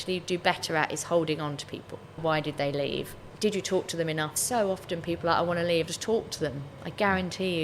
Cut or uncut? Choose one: cut